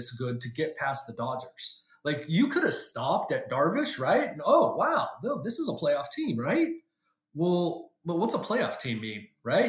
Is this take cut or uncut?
uncut